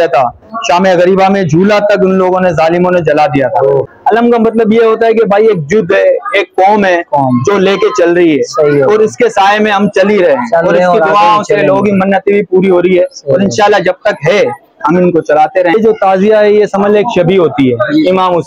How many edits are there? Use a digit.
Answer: 2